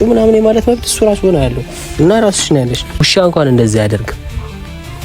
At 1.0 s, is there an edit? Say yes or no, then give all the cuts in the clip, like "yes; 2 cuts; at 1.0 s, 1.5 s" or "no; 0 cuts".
no; 1 cut; at 2.9 s